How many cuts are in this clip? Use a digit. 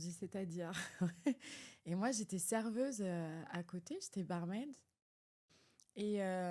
0